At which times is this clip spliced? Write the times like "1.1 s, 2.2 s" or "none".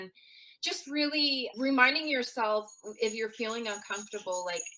none